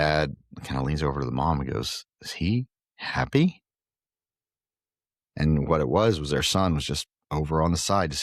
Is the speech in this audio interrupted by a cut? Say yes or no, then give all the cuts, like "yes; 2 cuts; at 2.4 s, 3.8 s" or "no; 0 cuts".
no; 0 cuts